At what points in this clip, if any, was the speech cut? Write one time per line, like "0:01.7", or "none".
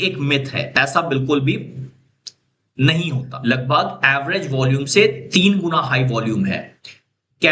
0:03.3